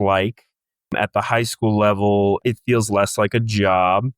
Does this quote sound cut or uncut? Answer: cut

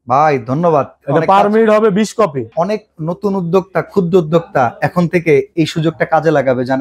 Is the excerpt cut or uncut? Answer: uncut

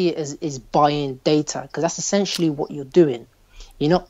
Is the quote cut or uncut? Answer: uncut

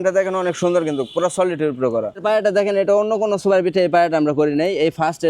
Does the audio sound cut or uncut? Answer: cut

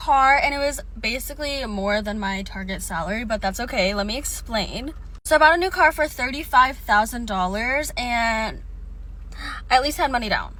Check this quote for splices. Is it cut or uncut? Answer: uncut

